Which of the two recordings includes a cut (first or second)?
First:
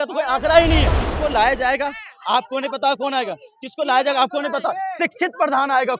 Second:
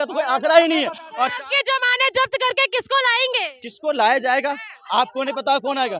first